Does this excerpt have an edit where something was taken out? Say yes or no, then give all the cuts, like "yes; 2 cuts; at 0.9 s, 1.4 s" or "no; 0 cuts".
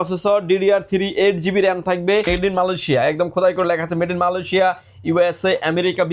yes; 1 cut; at 2.3 s